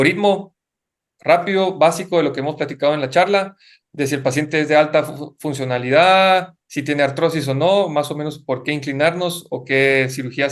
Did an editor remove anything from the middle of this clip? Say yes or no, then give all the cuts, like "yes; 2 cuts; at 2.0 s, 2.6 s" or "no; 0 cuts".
no; 0 cuts